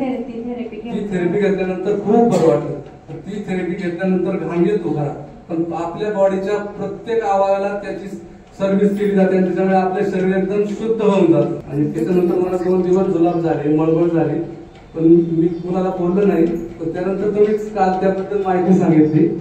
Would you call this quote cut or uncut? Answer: cut